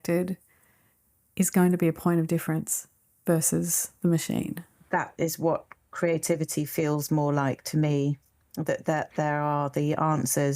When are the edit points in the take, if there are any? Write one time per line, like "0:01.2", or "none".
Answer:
0:04.7

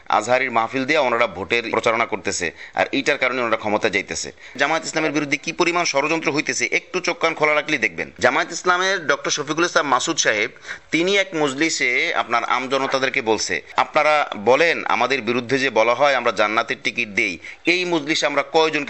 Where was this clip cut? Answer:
0:01.7
0:04.5

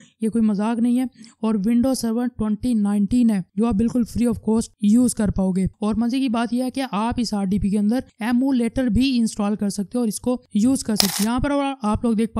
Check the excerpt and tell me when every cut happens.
0:05.8
0:11.1

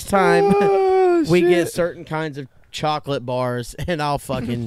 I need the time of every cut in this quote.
none

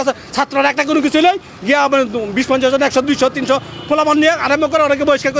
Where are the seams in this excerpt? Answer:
none

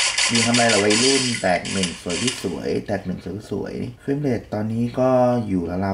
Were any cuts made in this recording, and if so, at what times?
0:03.9

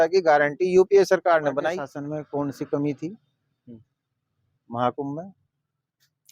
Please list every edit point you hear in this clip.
0:01.9

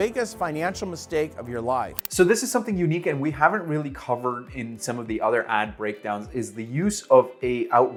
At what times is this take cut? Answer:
none

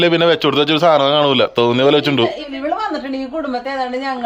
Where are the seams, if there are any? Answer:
0:02.5

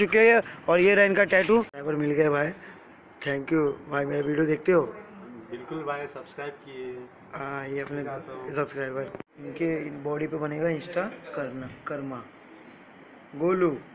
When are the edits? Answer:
0:01.8
0:09.4

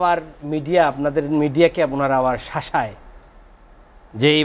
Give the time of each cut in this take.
none

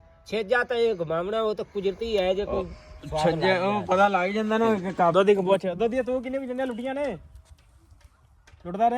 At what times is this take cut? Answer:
0:05.1

